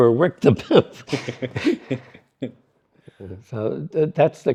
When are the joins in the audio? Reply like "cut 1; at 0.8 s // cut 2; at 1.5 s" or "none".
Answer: none